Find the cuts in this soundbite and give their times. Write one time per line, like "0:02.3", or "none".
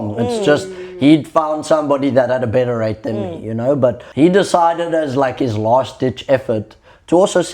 0:04.0